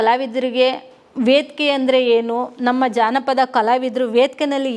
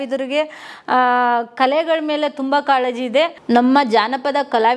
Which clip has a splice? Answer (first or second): second